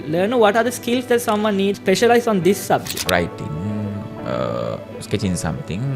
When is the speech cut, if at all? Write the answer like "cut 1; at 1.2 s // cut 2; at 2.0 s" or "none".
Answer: cut 1; at 1.8 s // cut 2; at 2.9 s